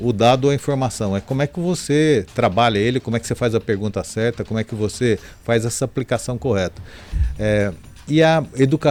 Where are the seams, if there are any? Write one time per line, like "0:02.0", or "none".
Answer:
none